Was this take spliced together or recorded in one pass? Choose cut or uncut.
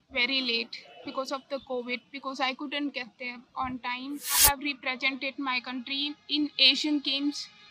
cut